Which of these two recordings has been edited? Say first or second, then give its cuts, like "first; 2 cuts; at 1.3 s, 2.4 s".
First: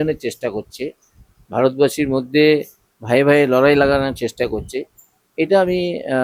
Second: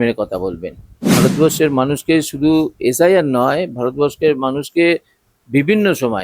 second; 1 cut; at 1.1 s